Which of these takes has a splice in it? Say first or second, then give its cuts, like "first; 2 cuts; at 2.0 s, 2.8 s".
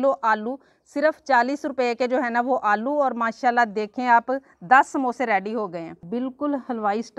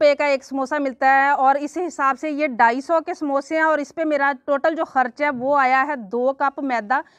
first; 1 cut; at 6.0 s